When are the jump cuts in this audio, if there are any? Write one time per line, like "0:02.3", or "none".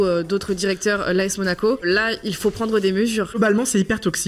0:01.8
0:03.4